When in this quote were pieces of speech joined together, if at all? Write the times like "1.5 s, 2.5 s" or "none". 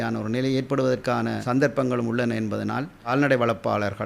1.4 s, 3.0 s